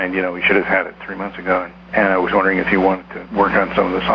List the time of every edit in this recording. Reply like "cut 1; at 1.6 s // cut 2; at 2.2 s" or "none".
cut 1; at 1.8 s // cut 2; at 3.1 s

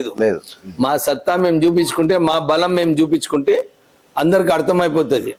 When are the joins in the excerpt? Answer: none

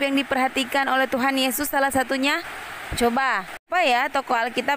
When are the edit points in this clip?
cut 1; at 3.7 s

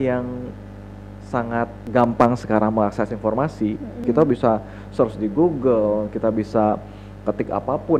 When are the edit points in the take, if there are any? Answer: cut 1; at 4.0 s

